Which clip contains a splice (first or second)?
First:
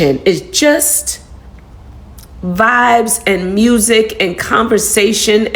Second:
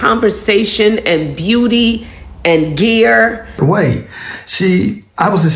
second